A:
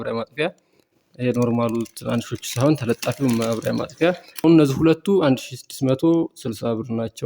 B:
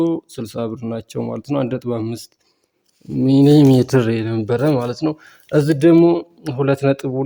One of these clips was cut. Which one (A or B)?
A